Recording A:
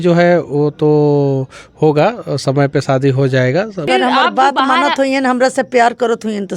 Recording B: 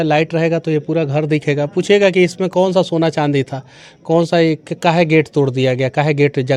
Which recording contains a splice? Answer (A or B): A